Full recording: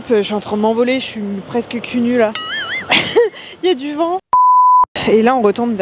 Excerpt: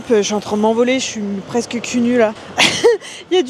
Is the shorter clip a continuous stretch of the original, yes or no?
no